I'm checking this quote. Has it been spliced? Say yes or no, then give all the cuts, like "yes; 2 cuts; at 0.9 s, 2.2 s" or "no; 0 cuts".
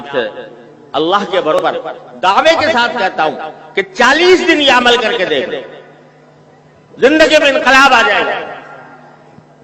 yes; 1 cut; at 1.6 s